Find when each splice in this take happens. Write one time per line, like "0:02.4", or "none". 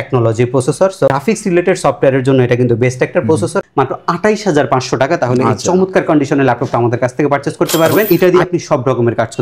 0:01.1
0:03.6
0:08.1